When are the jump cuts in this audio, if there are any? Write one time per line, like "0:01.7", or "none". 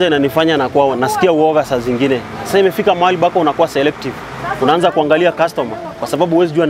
none